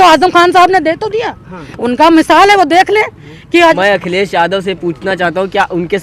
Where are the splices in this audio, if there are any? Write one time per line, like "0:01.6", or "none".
0:03.8